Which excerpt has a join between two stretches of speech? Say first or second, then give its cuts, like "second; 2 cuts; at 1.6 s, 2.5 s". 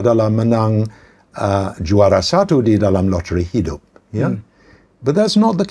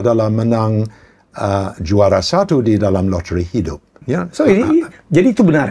second; 1 cut; at 3.9 s